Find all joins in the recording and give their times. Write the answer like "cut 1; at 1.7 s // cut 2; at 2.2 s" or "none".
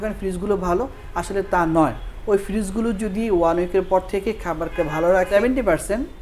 cut 1; at 5.3 s